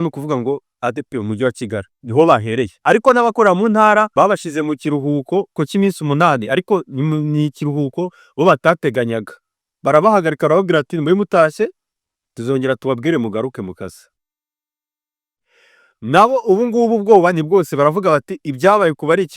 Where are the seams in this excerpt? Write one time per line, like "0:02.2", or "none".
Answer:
0:02.0
0:02.7
0:04.1
0:05.5